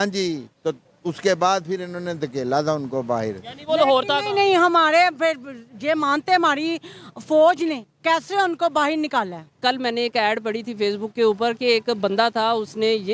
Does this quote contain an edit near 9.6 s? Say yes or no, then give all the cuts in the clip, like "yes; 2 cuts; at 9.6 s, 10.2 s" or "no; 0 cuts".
yes; 1 cut; at 9.6 s